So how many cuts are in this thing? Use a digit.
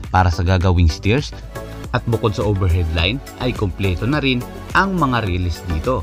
1